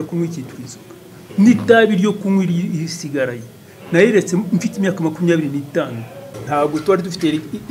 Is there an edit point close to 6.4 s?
yes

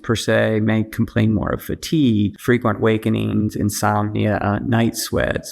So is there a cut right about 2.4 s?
yes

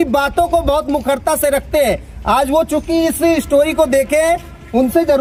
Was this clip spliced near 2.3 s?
no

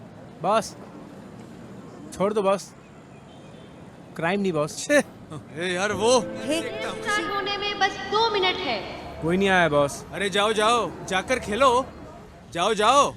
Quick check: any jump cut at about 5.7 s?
no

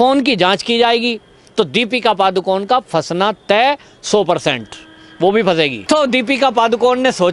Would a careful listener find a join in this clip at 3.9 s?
no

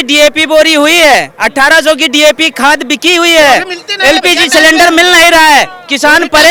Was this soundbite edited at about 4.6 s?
no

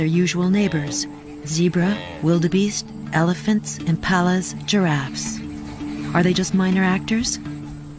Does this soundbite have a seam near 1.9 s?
yes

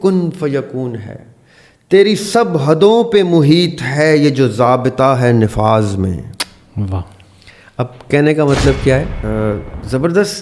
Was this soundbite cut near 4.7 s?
no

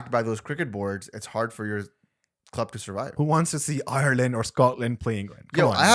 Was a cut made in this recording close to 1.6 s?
no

